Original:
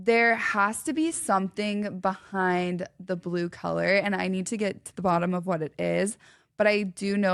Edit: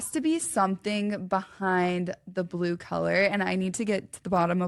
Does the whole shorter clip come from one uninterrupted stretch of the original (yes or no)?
yes